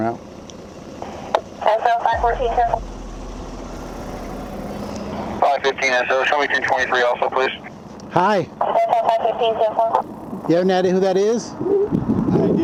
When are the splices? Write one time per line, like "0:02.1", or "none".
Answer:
none